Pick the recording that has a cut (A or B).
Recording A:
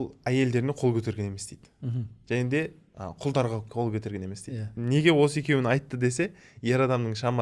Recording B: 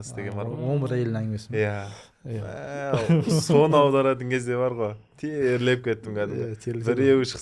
A